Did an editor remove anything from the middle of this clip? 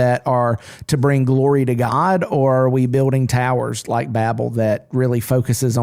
no; 0 cuts

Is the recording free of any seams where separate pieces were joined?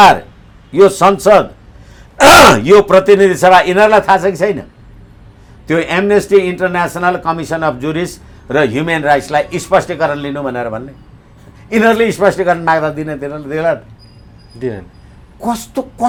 yes; 0 cuts

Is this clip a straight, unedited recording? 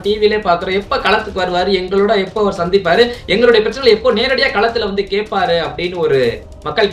yes; 0 cuts

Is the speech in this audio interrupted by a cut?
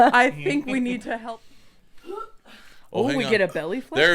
yes; 1 cut; at 1.2 s

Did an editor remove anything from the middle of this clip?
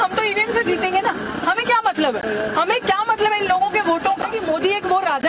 yes; 1 cut; at 4.3 s

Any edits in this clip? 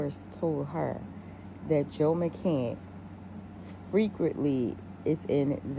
no; 0 cuts

